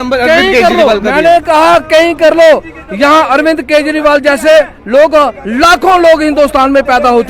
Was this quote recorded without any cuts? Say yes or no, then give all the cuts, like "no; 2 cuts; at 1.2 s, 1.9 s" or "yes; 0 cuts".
yes; 0 cuts